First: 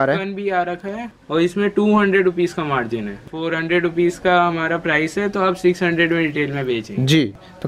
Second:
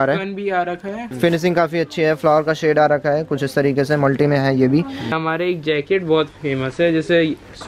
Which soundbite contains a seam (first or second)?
second